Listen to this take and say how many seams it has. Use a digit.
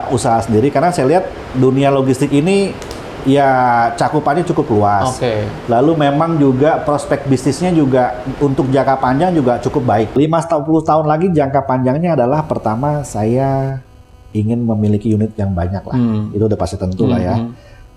1